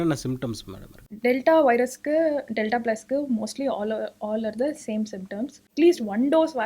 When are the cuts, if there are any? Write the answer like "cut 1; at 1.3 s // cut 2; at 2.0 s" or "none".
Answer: cut 1; at 5.6 s